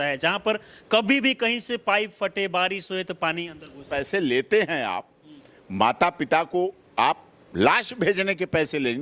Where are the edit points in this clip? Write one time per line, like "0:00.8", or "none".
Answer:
0:03.9

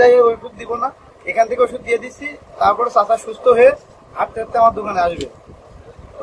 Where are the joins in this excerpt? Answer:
none

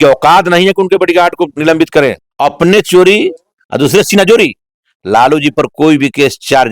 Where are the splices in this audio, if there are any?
0:02.3

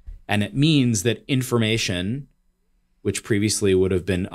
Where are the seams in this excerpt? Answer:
none

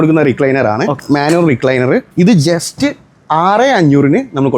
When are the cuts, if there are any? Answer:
0:01.0
0:02.1

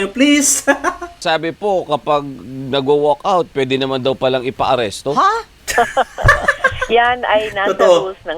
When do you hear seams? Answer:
0:01.2
0:05.5

